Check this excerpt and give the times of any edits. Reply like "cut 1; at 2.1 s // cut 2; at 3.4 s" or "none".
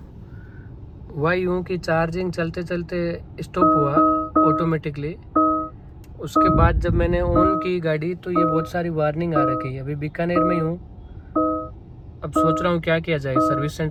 none